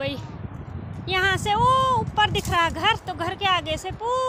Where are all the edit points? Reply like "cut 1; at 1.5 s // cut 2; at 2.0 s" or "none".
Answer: none